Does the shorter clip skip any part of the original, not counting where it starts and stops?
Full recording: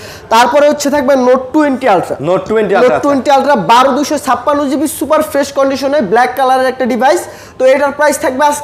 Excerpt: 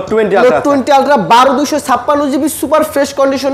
no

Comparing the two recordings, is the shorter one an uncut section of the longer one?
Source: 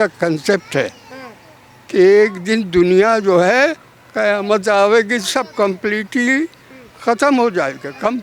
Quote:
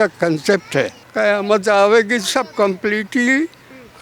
no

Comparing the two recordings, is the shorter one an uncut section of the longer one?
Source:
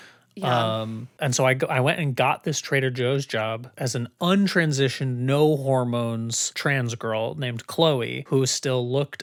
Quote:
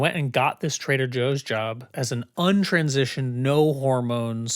yes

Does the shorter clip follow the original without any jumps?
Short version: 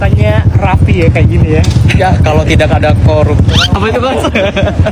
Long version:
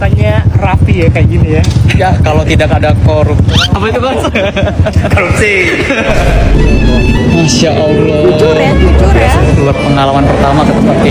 yes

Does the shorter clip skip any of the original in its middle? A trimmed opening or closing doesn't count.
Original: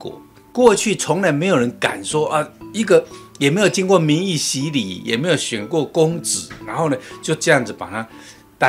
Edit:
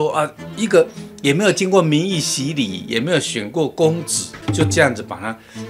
yes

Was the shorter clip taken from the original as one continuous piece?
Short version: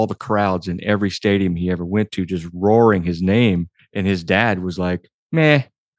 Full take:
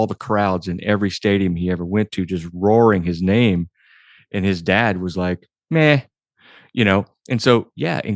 no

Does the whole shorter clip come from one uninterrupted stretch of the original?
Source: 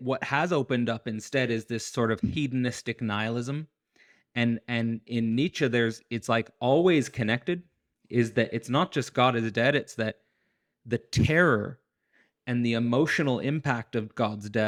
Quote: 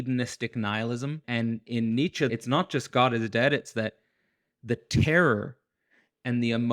no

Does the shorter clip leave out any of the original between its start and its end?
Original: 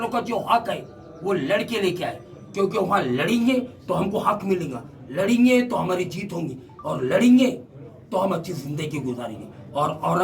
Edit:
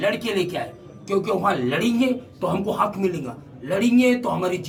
no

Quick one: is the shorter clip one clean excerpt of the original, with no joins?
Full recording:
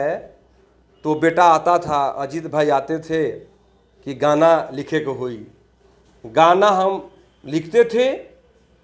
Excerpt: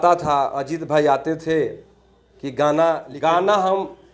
no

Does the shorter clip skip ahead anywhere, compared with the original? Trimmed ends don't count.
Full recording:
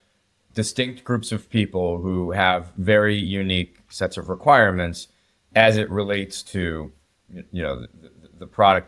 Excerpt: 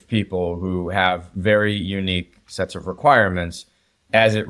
no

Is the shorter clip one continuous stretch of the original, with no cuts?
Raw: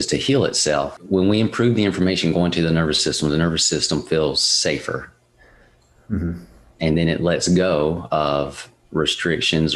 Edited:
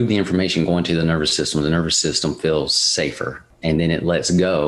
no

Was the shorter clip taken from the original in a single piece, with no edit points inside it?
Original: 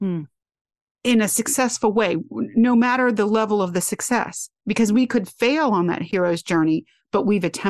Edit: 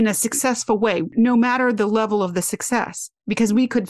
no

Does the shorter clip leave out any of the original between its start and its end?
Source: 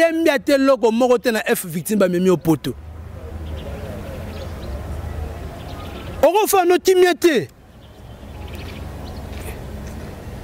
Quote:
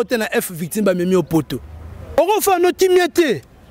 yes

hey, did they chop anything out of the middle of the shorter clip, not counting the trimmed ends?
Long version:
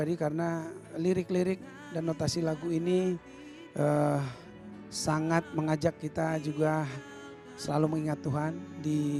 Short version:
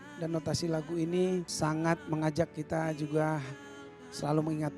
yes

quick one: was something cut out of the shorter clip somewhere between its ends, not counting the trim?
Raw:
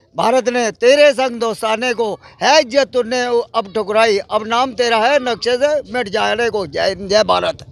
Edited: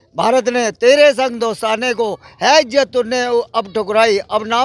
no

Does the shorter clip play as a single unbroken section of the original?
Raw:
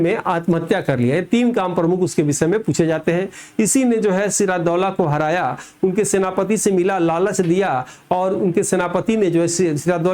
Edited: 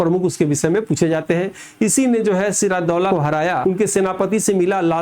no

